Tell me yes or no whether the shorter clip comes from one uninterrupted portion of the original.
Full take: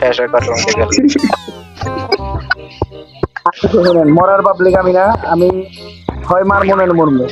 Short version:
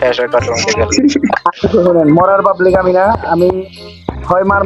no